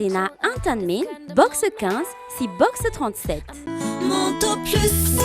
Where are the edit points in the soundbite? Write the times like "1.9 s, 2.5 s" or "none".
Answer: 3.6 s